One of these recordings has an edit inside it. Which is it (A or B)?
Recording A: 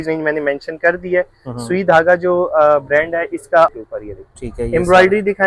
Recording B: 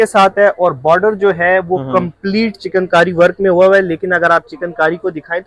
A